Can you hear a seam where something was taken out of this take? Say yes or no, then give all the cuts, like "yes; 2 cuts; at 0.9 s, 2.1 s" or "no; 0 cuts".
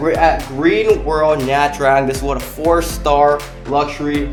no; 0 cuts